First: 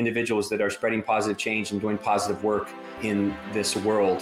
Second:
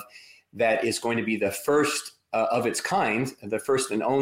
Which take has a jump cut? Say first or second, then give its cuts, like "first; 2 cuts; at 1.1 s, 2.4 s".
first; 1 cut; at 3.0 s